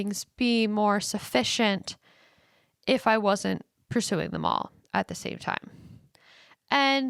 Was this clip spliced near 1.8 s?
no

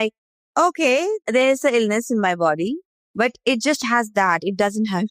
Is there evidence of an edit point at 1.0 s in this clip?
no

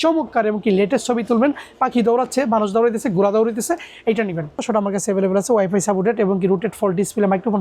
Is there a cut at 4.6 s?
yes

